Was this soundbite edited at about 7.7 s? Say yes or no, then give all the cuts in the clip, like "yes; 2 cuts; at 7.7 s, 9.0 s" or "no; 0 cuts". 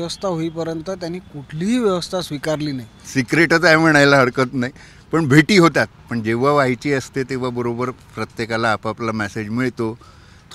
no; 1 cut; at 3.0 s